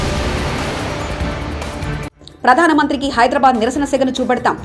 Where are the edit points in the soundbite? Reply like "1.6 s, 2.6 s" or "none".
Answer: 2.1 s